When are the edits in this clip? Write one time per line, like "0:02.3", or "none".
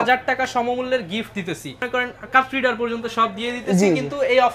0:01.8